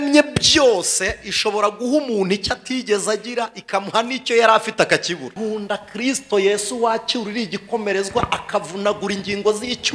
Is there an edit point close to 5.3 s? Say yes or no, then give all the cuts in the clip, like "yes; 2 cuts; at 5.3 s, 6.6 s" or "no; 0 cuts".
yes; 1 cut; at 5.3 s